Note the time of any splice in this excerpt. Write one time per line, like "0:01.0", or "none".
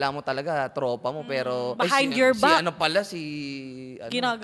none